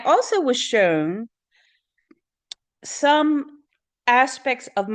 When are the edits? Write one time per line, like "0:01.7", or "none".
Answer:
none